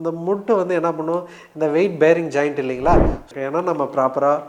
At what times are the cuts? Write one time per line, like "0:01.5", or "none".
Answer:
0:03.2